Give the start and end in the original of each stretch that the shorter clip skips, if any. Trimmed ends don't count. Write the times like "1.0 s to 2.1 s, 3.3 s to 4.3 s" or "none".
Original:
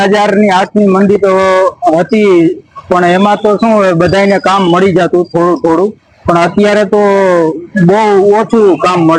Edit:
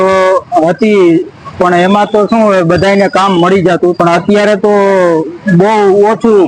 5.3 s to 6.2 s